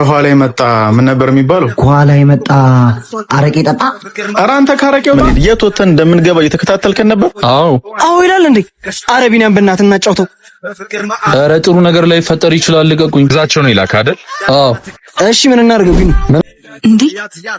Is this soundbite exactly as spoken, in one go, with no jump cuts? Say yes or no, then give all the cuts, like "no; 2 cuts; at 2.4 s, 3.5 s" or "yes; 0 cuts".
no; 2 cuts; at 5.2 s, 16.4 s